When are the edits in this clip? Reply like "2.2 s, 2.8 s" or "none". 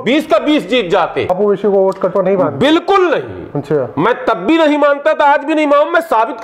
1.3 s